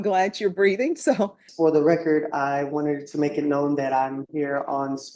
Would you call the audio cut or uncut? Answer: cut